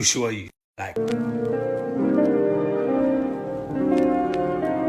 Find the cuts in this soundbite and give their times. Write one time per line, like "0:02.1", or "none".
0:01.0